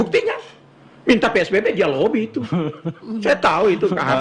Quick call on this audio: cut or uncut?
uncut